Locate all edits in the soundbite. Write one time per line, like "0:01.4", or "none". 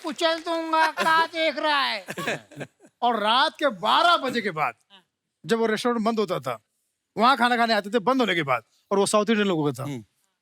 none